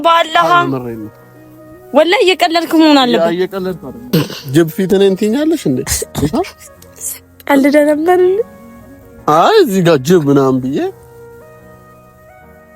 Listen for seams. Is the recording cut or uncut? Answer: cut